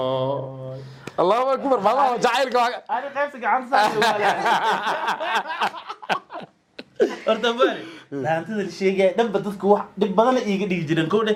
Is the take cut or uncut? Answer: uncut